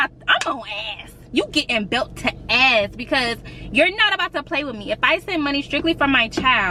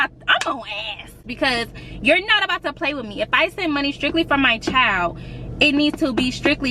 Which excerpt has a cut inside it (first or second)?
second